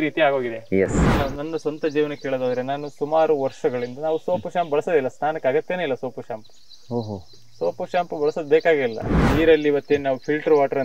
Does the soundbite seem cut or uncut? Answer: cut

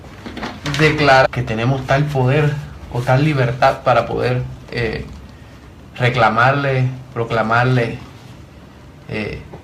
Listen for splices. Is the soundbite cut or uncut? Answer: uncut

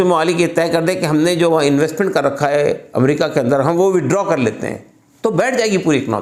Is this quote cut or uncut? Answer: uncut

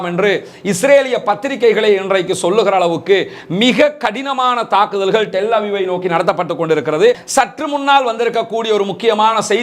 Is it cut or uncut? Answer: cut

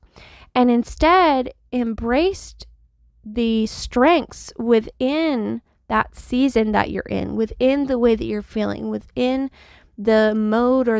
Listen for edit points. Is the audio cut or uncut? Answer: uncut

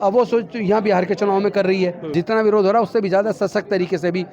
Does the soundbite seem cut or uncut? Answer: cut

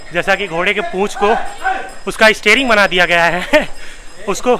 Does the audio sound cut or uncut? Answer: uncut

